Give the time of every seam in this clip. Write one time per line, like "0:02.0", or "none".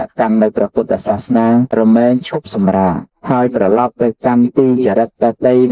0:01.9
0:03.5